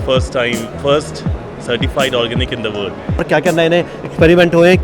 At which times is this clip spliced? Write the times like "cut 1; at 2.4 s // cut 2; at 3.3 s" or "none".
cut 1; at 3.2 s